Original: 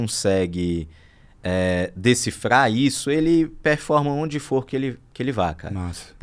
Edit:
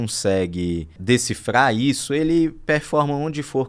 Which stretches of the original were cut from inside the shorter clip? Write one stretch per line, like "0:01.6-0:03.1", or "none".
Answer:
0:01.0-0:01.9